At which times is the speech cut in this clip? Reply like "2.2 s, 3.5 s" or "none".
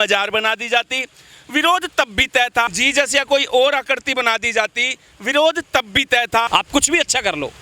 2.8 s, 6.5 s

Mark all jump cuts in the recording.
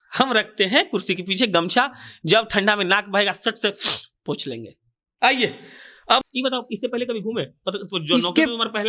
6.2 s

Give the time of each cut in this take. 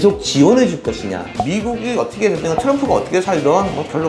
1.4 s

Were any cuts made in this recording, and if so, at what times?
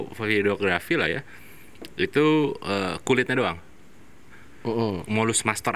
none

